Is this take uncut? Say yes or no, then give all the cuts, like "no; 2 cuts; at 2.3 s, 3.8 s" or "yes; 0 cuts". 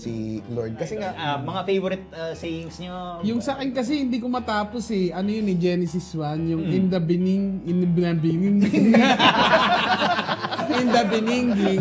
no; 1 cut; at 1.2 s